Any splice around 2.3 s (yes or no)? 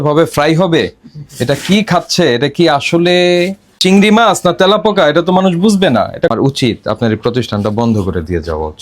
no